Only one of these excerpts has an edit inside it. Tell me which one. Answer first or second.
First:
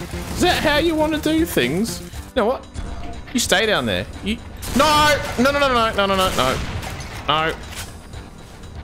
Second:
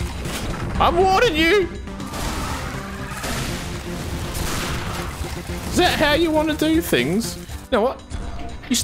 second